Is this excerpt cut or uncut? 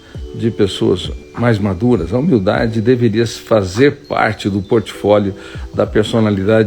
cut